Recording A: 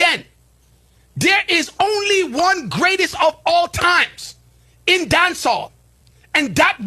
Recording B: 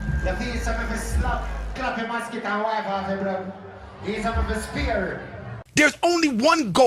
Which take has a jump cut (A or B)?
B